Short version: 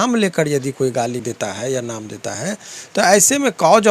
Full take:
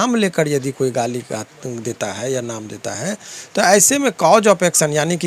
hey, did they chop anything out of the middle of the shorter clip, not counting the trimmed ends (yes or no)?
yes